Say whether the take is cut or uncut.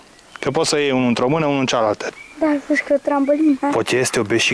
cut